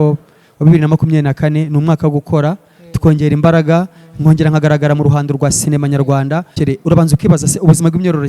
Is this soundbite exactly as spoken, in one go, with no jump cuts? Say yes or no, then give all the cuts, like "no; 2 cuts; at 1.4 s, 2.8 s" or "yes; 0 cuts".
no; 1 cut; at 6.6 s